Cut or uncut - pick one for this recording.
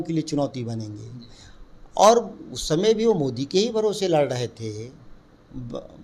uncut